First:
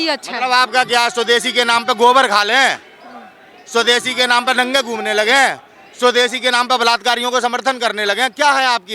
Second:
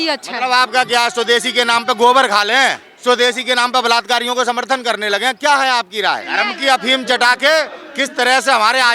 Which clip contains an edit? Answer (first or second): second